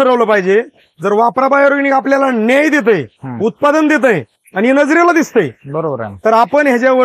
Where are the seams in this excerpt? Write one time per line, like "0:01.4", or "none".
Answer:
none